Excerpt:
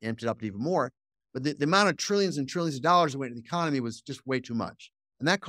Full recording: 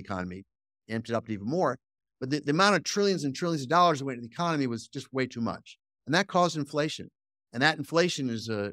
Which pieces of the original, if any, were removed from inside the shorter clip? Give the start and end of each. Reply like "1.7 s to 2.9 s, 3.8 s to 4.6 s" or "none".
none